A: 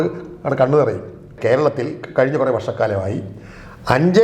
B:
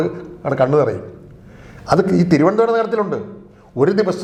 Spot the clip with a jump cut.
A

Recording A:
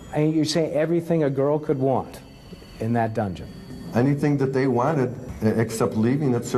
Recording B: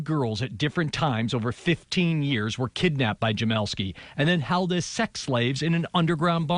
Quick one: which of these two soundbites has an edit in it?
A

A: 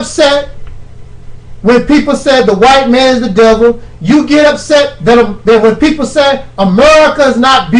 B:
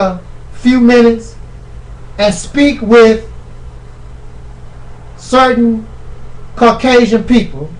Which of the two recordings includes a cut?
B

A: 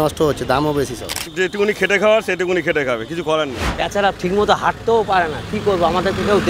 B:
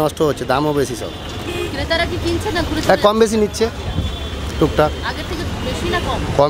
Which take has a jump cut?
A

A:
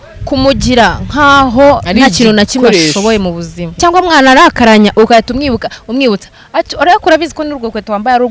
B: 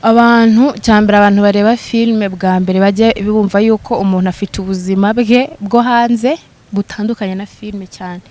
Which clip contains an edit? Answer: A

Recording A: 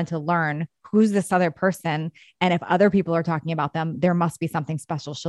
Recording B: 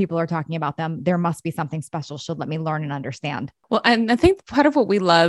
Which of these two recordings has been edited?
B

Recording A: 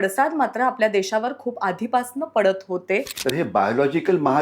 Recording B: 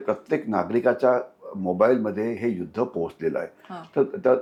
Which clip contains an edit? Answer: A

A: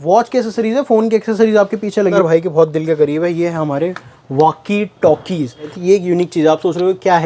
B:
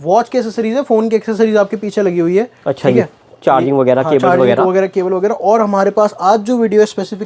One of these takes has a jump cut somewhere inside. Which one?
A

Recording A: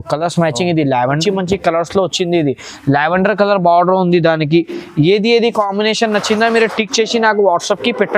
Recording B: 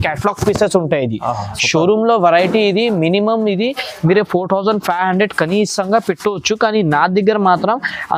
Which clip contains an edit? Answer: A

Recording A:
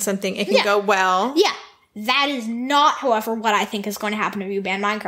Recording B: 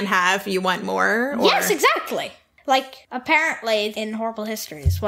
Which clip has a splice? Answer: B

